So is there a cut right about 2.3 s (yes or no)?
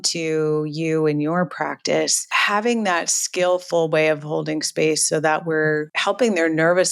yes